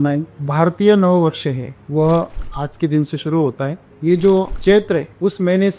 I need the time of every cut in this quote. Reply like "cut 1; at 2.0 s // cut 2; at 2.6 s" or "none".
cut 1; at 3.8 s